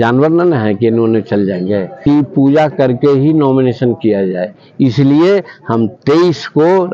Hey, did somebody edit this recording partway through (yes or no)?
yes